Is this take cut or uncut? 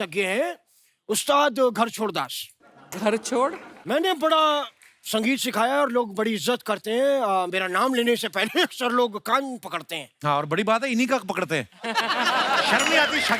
uncut